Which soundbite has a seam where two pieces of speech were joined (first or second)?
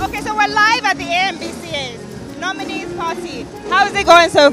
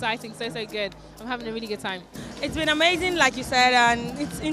second